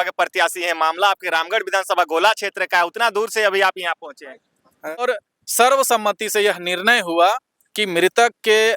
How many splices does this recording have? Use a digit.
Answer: 1